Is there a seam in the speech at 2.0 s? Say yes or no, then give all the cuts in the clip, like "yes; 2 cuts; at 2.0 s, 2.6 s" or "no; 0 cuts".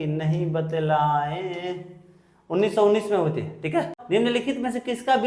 no; 1 cut; at 4.0 s